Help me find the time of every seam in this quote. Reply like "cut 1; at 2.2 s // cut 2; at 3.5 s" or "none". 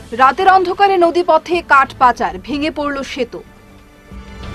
none

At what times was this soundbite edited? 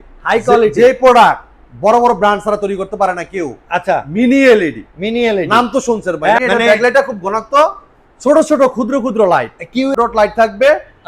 cut 1; at 6.4 s // cut 2; at 9.9 s

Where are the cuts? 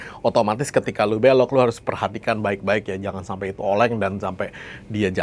none

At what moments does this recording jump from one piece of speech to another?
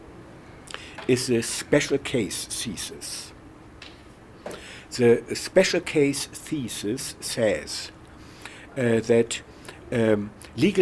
cut 1; at 6.2 s

